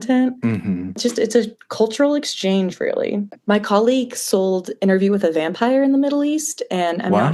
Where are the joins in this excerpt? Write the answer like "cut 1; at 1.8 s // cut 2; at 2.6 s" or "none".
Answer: cut 1; at 1.0 s // cut 2; at 3.4 s